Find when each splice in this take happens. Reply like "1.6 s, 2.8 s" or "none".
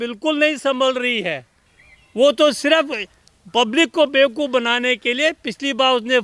none